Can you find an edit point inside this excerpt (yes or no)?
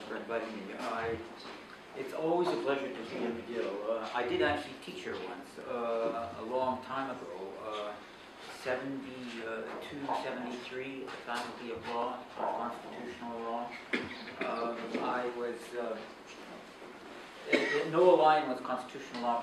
no